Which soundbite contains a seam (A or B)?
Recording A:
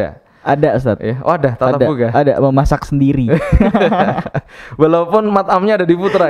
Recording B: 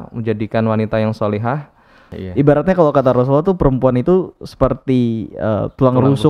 B